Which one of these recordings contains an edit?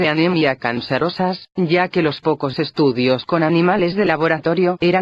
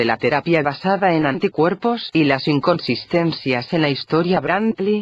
second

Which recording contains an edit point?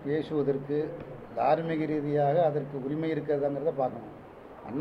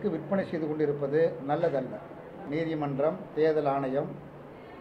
second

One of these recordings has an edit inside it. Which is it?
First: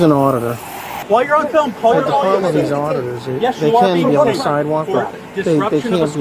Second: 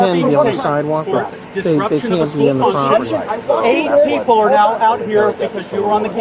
first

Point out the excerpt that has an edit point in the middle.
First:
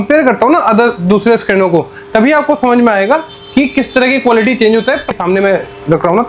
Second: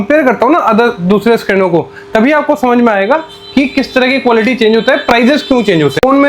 first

